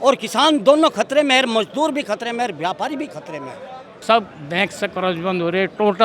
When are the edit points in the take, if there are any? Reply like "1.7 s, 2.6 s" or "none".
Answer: 3.9 s